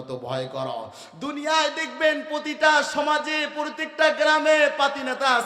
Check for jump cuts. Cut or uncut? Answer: uncut